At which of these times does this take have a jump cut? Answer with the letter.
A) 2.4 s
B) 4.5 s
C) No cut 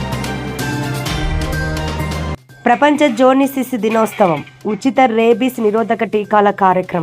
A